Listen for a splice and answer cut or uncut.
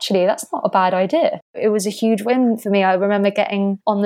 cut